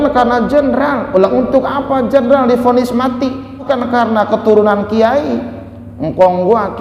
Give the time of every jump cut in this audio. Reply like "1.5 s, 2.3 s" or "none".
3.7 s